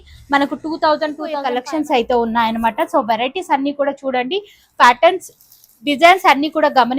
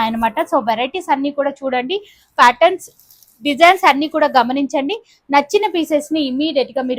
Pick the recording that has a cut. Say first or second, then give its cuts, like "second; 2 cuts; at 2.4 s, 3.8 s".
first; 1 cut; at 1.5 s